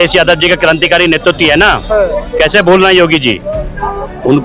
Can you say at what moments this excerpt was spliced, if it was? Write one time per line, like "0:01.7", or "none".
none